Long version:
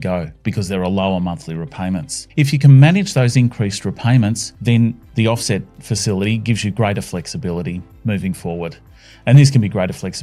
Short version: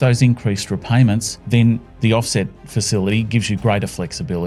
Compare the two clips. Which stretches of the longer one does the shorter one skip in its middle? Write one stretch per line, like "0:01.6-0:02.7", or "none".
none